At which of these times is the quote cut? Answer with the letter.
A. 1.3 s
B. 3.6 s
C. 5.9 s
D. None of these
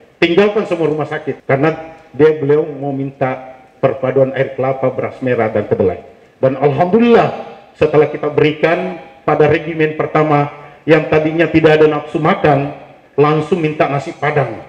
A